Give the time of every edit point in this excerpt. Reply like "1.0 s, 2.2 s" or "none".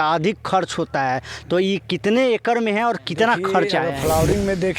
3.9 s